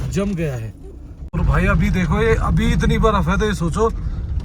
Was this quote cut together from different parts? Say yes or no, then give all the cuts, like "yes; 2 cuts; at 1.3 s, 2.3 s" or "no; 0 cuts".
yes; 1 cut; at 1.1 s